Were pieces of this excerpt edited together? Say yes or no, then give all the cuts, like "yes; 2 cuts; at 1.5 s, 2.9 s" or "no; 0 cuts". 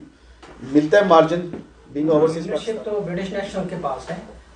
yes; 1 cut; at 2.6 s